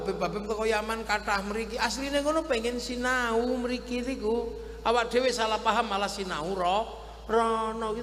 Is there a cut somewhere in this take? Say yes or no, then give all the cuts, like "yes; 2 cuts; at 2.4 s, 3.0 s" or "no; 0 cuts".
no; 0 cuts